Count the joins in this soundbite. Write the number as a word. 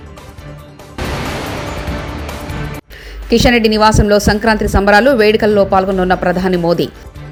zero